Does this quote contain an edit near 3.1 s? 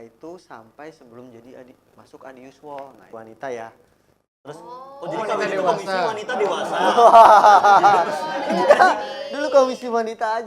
yes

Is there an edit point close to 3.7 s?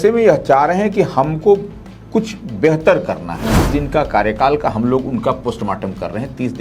yes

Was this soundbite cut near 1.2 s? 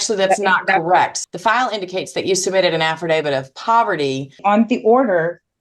yes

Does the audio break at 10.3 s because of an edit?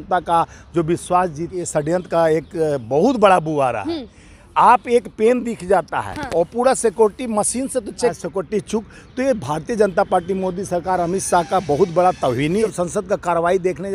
no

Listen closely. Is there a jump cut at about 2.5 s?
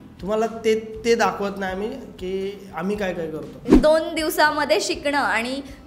no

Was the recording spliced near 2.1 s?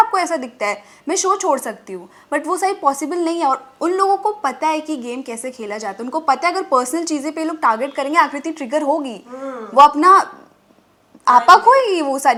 no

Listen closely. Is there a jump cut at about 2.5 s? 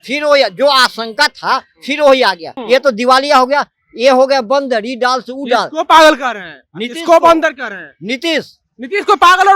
yes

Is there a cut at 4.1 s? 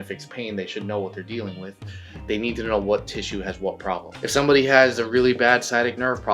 yes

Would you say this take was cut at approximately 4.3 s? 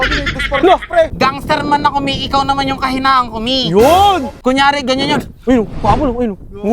yes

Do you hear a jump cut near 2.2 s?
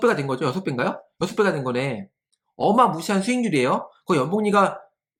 no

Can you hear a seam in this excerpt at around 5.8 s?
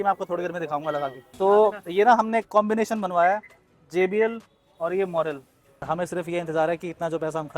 yes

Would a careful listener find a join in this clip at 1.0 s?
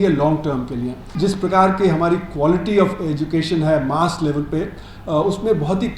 yes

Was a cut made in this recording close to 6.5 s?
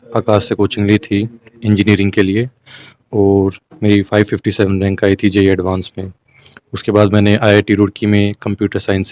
no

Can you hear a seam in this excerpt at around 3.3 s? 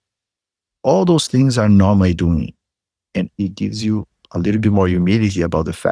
yes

